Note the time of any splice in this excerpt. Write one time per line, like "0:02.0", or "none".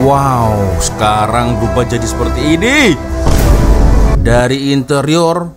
0:04.2